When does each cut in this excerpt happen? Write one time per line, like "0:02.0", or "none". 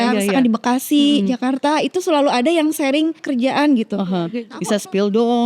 0:03.2
0:04.5